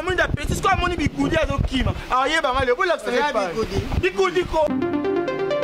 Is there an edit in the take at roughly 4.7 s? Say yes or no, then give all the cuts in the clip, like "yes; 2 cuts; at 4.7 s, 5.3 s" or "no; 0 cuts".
yes; 1 cut; at 4.7 s